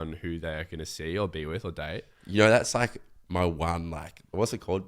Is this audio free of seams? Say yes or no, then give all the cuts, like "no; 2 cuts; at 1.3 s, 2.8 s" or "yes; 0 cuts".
yes; 0 cuts